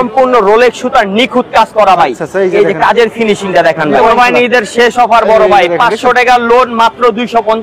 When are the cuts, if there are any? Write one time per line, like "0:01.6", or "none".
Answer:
0:04.0